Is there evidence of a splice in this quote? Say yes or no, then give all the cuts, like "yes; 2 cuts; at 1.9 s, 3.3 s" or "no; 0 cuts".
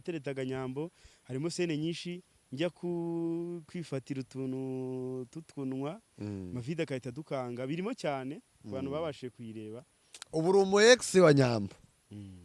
no; 0 cuts